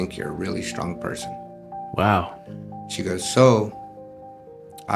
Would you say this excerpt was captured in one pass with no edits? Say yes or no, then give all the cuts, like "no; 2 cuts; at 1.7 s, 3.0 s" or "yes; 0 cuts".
yes; 0 cuts